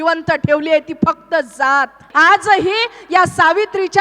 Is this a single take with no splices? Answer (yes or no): no